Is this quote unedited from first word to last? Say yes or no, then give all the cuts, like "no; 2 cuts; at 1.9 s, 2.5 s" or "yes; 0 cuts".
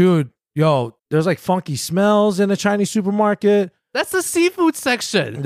no; 1 cut; at 0.9 s